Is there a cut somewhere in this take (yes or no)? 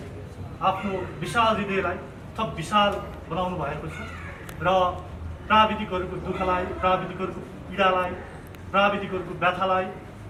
no